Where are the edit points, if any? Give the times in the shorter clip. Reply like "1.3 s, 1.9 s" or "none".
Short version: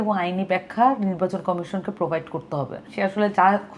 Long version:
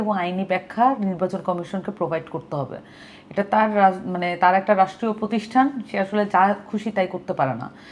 2.9 s